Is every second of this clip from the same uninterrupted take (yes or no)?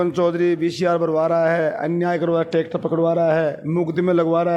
yes